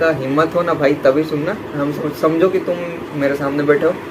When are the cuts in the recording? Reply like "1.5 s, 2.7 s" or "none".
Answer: 1.7 s